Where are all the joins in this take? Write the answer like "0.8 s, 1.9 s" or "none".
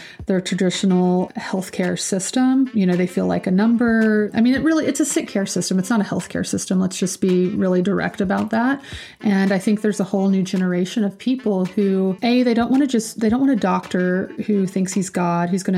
1.3 s, 2.7 s, 4.3 s, 12.2 s